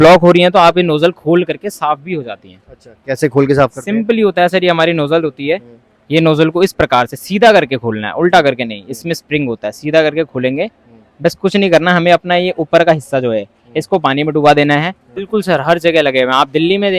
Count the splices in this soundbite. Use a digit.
1